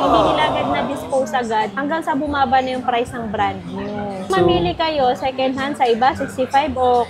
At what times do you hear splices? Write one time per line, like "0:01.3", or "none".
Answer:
none